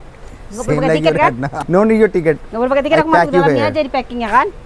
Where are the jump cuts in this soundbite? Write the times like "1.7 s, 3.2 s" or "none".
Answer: 1.5 s